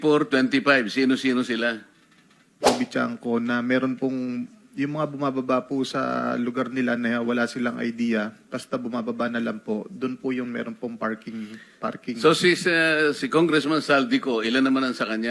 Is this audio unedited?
no; 1 cut; at 2.6 s

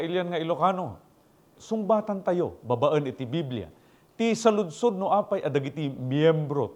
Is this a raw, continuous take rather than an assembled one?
no; 1 cut; at 1.5 s

